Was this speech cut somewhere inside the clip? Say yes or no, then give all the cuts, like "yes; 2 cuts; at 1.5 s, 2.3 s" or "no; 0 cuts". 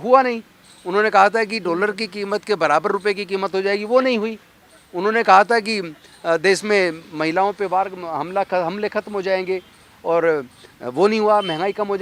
no; 0 cuts